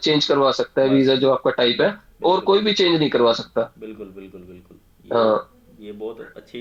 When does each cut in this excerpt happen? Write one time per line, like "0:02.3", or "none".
none